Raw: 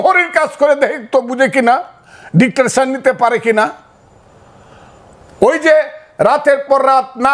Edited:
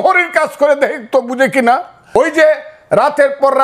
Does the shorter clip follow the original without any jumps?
no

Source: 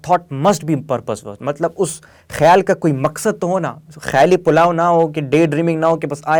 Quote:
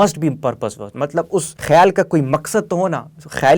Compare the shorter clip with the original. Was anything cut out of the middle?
yes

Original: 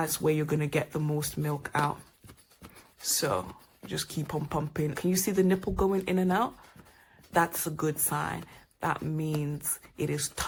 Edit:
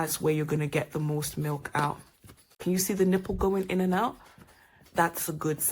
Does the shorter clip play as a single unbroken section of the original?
no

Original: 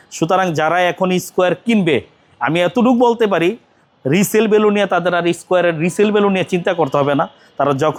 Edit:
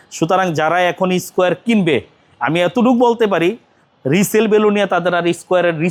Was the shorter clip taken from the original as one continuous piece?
yes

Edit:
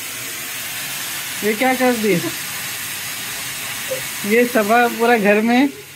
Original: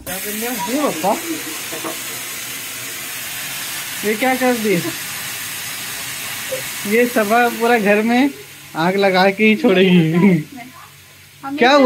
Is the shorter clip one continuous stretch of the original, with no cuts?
yes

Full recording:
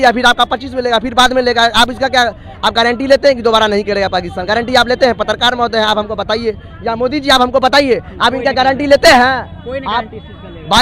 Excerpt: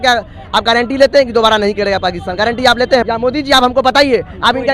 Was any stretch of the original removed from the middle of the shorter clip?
yes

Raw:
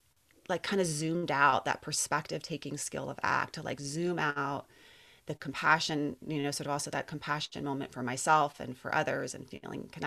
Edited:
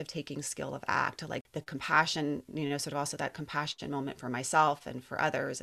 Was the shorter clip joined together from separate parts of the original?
yes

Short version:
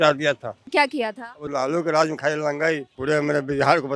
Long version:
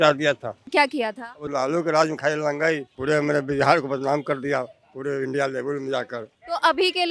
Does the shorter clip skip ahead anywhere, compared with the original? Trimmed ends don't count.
no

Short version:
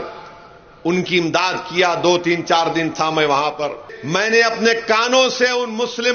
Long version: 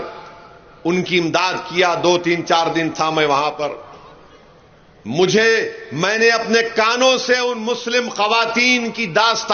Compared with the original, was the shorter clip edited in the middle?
yes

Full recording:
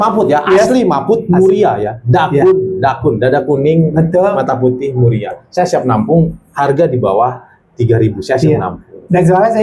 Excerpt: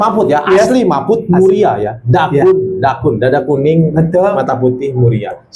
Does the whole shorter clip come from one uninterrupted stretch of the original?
yes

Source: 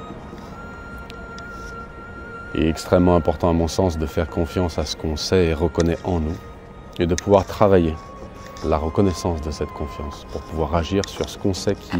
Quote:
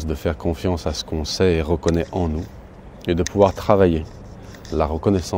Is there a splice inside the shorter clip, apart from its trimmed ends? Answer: no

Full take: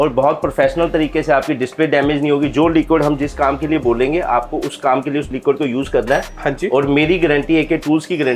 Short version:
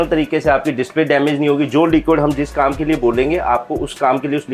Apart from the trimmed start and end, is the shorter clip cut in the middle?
no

